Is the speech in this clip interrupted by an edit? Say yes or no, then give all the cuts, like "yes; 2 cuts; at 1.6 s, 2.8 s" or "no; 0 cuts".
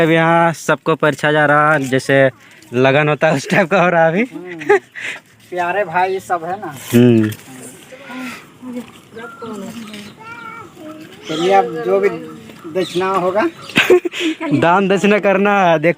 no; 0 cuts